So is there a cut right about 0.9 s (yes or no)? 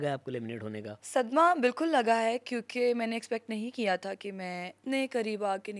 yes